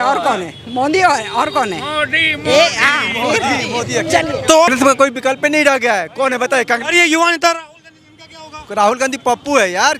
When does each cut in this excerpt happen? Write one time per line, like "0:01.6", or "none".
0:04.7